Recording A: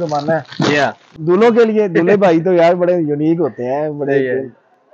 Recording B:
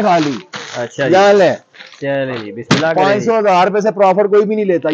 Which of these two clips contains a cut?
A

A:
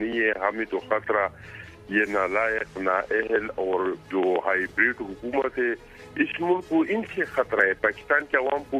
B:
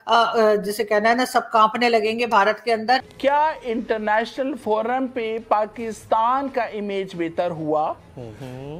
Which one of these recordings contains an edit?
B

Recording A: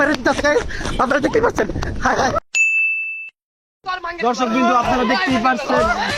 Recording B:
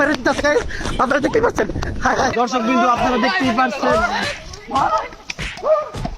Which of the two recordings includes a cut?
B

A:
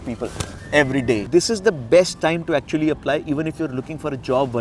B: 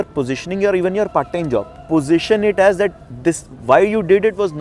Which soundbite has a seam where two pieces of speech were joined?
A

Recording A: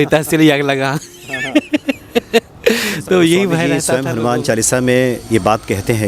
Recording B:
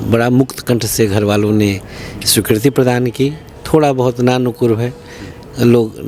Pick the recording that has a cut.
A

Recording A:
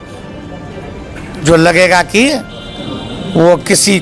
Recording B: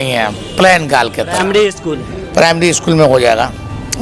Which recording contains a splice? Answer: B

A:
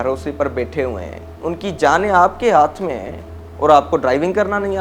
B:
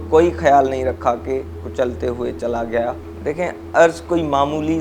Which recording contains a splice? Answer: B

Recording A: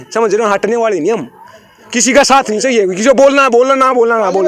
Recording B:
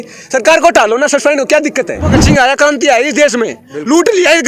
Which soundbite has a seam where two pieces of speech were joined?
B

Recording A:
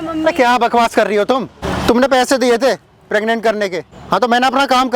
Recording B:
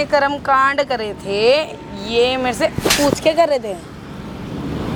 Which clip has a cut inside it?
A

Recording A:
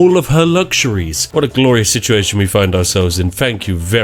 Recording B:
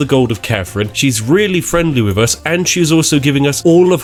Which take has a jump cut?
A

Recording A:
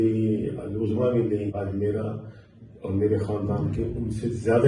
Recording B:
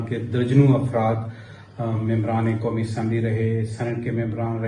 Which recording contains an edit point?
A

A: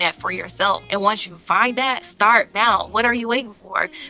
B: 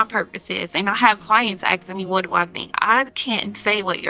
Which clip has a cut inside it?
A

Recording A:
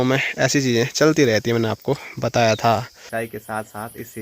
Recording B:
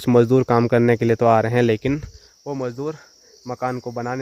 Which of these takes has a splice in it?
A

